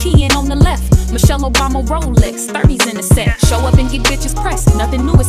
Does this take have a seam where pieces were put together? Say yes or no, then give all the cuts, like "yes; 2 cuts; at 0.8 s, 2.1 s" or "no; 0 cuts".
no; 0 cuts